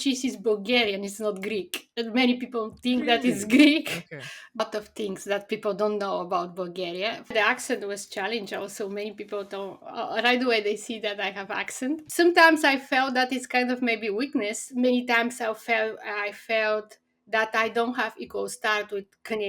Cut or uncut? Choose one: cut